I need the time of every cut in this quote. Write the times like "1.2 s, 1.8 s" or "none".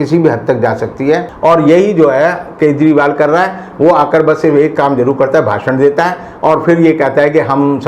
1.3 s

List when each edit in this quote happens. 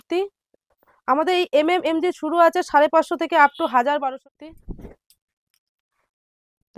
4.1 s

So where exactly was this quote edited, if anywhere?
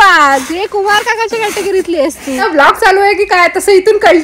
2.4 s

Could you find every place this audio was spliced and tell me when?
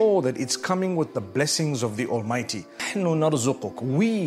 2.9 s

